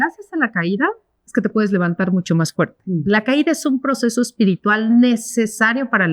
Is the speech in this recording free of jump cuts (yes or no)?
yes